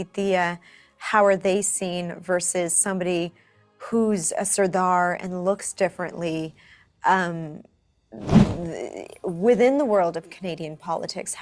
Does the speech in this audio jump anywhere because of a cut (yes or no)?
no